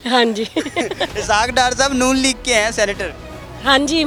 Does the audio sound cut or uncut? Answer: uncut